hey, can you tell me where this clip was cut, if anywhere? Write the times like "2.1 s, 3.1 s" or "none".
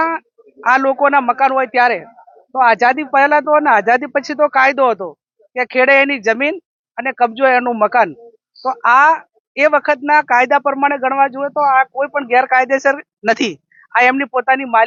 none